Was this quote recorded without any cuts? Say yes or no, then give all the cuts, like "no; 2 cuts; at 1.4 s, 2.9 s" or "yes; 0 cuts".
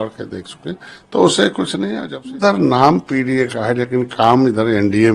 no; 1 cut; at 2.1 s